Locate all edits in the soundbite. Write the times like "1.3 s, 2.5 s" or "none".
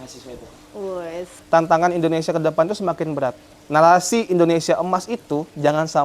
1.3 s, 3.5 s